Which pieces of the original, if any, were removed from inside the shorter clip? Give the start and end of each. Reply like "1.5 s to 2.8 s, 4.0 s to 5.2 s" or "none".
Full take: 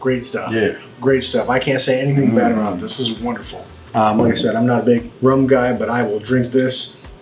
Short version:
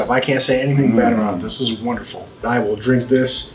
3.8 s to 5.9 s

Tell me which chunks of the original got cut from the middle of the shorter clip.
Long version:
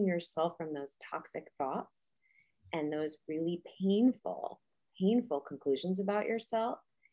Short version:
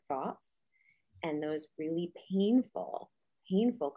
none

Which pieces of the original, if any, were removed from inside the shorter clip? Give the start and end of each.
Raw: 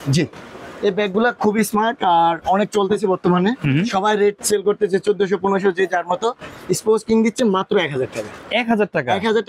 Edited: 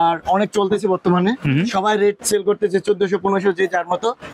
none

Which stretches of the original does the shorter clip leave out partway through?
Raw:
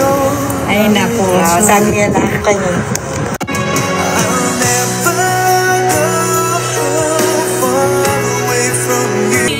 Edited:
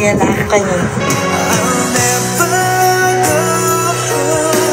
3.0 s to 3.7 s

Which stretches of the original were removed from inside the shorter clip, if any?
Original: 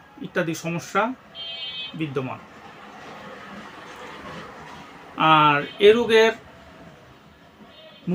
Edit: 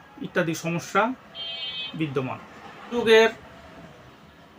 2.9 s to 6.0 s

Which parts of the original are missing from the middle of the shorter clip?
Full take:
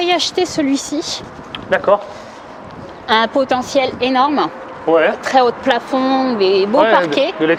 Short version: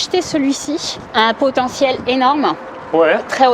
1.2 s to 2.9 s

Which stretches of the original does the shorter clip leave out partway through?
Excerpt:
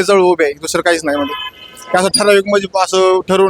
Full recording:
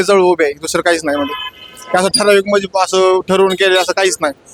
none

